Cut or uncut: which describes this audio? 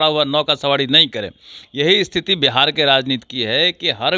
uncut